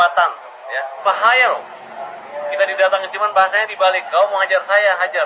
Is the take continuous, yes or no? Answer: no